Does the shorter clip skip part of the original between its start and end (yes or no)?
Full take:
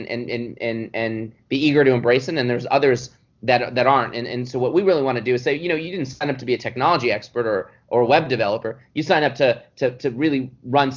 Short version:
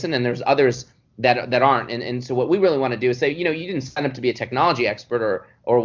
no